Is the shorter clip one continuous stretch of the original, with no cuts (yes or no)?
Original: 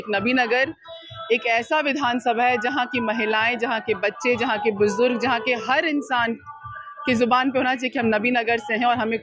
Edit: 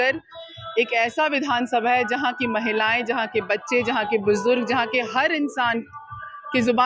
yes